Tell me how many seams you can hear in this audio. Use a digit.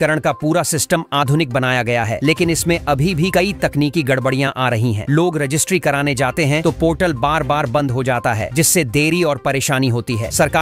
0